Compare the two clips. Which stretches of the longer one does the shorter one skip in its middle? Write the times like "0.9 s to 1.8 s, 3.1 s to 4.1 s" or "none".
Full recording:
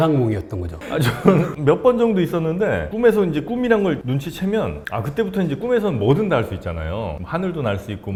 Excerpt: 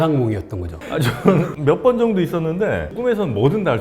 2.9 s to 5.5 s